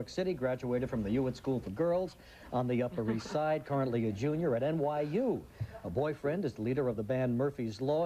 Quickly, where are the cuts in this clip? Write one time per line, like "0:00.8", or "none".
0:04.7